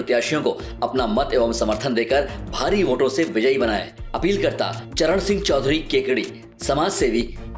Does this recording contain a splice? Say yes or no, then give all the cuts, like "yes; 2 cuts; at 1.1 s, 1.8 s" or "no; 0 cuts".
no; 0 cuts